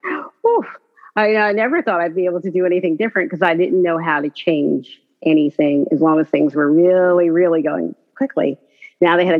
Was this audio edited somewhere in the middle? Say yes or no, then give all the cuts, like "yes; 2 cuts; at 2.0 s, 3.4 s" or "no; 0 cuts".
no; 0 cuts